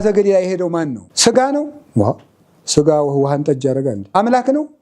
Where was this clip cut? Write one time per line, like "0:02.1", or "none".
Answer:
0:01.0
0:04.1